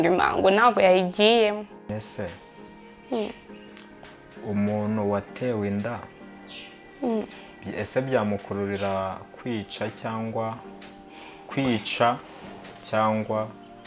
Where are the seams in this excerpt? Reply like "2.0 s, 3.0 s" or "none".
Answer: 1.9 s